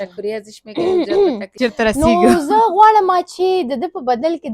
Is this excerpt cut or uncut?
cut